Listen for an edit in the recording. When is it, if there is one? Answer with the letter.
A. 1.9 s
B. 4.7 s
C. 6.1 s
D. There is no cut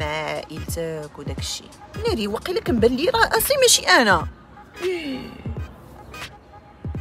A